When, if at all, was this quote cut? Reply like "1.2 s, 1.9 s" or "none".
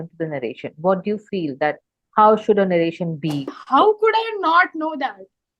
3.5 s